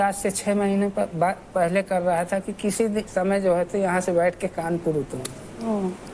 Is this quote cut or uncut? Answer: uncut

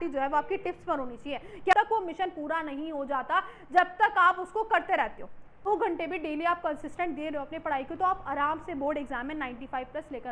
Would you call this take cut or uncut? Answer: cut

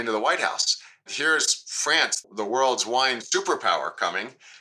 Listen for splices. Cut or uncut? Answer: cut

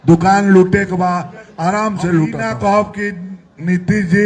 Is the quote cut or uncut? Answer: cut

